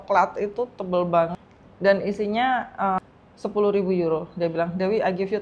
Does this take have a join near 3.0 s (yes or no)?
yes